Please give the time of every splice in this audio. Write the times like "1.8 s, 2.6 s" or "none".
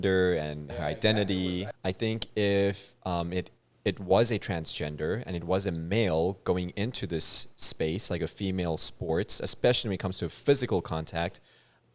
1.6 s